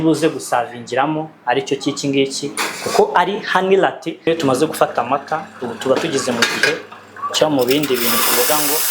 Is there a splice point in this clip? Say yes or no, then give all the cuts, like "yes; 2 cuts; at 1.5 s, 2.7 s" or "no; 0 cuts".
yes; 1 cut; at 4.1 s